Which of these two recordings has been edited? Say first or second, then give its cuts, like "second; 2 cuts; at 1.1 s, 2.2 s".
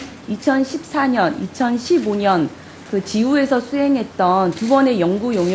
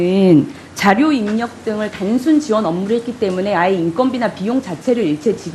first; 1 cut; at 2.9 s